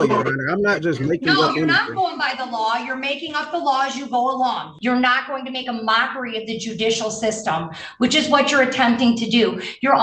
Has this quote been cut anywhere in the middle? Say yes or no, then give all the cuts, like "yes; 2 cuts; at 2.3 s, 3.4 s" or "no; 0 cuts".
yes; 1 cut; at 4.7 s